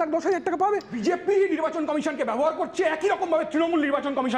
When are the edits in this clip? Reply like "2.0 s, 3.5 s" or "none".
1.0 s